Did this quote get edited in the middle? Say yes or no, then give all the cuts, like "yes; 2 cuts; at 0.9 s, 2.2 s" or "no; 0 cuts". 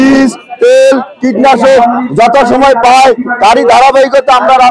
no; 0 cuts